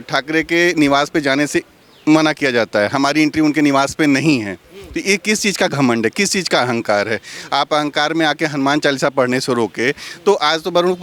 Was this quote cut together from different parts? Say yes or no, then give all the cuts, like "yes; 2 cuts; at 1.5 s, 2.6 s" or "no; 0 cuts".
no; 0 cuts